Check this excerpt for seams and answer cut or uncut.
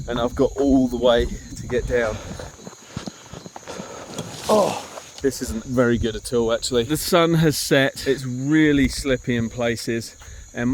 cut